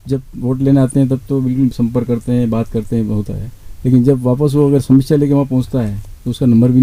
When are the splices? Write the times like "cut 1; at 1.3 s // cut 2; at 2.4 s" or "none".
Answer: none

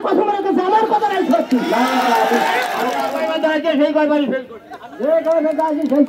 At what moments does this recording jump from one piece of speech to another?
cut 1; at 3.0 s

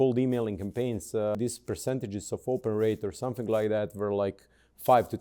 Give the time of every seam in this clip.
cut 1; at 1.4 s

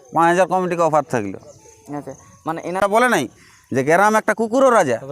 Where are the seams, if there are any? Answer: cut 1; at 2.8 s

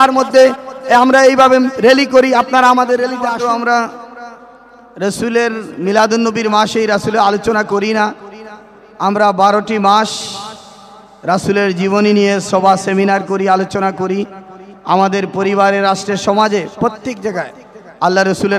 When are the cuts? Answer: cut 1; at 3.2 s

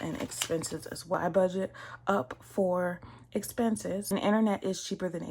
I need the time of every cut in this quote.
cut 1; at 1.1 s // cut 2; at 4.1 s

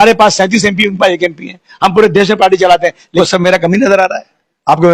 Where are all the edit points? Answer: cut 1; at 3.1 s

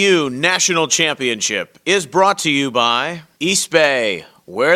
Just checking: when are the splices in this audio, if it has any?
cut 1; at 3.2 s

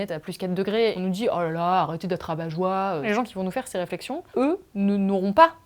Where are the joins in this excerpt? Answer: cut 1; at 3.1 s // cut 2; at 4.2 s

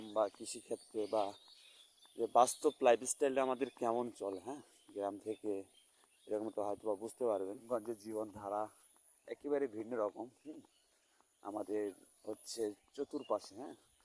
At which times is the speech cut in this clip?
cut 1; at 7.6 s

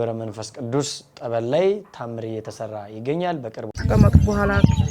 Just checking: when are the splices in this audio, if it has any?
cut 1; at 3.8 s

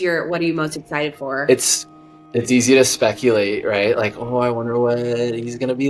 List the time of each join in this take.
none

